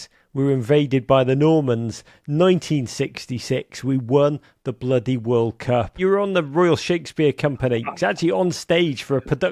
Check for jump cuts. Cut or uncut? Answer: cut